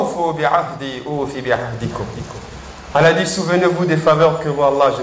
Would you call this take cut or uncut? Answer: uncut